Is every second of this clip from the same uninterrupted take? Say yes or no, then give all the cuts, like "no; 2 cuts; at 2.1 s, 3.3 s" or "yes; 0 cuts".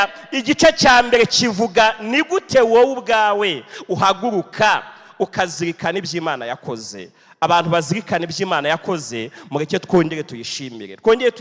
yes; 0 cuts